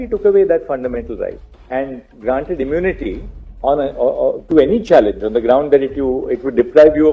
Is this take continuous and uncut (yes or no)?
yes